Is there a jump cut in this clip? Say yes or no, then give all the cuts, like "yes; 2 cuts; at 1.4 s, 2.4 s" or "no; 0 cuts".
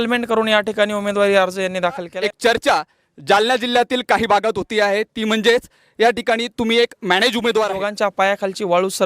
yes; 2 cuts; at 2.1 s, 7.8 s